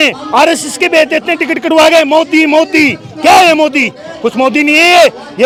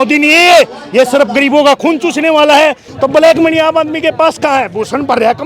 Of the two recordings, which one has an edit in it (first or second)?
second